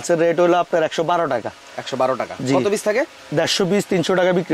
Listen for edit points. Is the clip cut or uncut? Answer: uncut